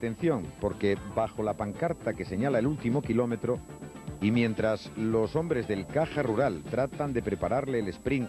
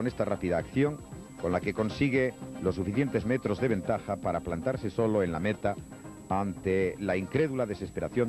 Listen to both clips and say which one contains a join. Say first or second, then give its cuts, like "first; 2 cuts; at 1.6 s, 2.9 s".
second; 1 cut; at 6.9 s